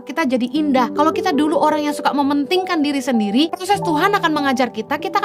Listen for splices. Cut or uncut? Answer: cut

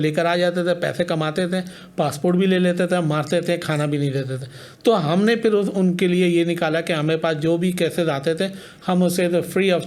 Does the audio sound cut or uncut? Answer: uncut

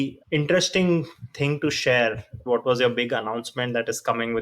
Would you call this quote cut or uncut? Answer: uncut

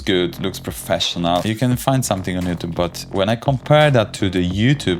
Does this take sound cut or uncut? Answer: cut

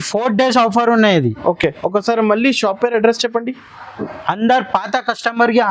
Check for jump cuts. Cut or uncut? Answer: uncut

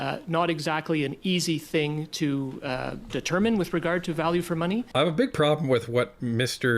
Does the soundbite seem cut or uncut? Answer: cut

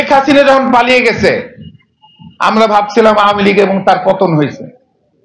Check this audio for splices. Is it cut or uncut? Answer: uncut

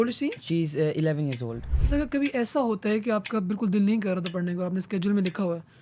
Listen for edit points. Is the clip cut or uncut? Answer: cut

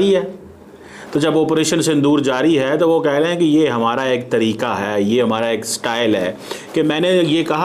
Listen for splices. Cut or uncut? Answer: uncut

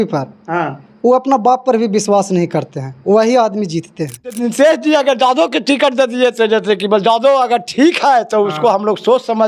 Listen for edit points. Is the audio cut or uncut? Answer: cut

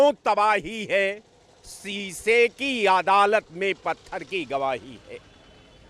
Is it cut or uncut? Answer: uncut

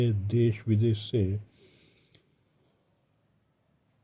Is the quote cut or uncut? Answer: uncut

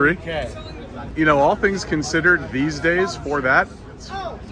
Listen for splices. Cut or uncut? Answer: cut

